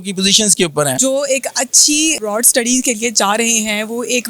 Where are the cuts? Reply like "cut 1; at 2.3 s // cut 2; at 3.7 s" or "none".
cut 1; at 1.0 s // cut 2; at 2.2 s